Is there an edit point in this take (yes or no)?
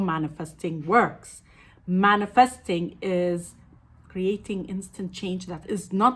no